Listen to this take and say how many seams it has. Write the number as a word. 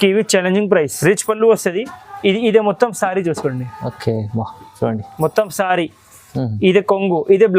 one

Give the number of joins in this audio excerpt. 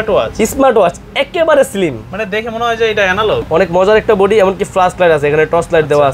one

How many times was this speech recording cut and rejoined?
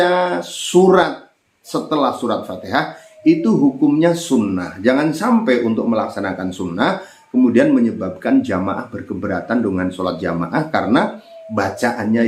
zero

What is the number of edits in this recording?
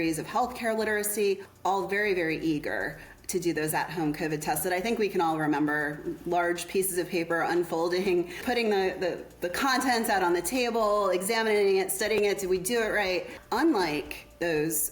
three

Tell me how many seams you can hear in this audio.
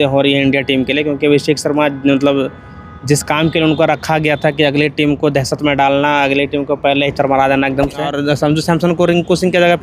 one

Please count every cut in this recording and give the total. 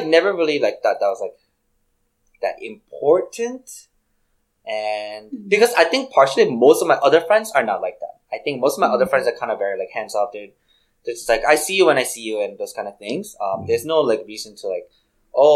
zero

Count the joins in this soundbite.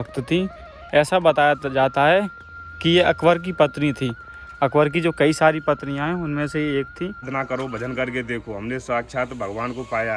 one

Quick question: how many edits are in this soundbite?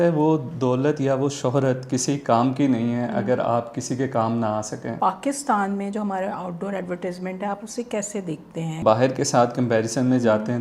two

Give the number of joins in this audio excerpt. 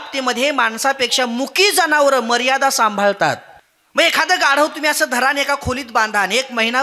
one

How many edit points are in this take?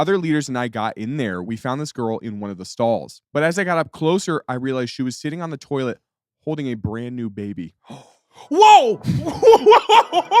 one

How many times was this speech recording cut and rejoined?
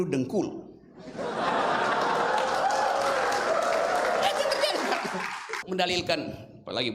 one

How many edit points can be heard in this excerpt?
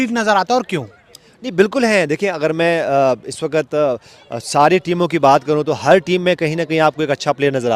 zero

